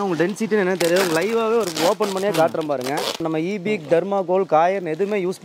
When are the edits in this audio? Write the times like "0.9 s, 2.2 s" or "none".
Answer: 3.2 s